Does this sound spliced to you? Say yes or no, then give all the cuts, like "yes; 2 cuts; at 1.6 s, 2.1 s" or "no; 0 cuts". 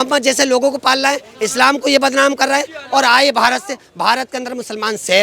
no; 0 cuts